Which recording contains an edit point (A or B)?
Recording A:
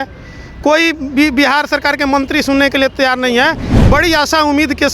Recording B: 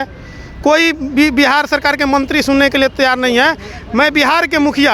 A